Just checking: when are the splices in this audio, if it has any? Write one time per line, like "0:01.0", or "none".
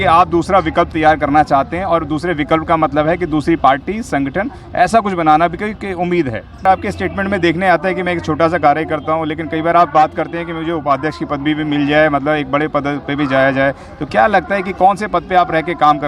0:06.6